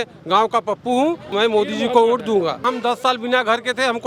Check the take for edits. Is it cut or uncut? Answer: cut